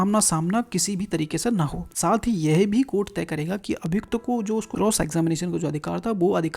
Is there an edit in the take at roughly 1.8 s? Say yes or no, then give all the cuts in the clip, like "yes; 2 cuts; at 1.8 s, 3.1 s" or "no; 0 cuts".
yes; 2 cuts; at 1.8 s, 4.7 s